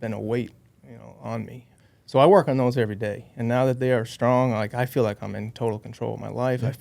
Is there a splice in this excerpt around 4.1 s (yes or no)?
no